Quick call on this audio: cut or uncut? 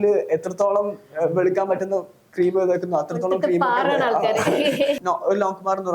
cut